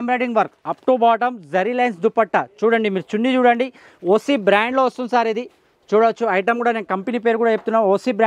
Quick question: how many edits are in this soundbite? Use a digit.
0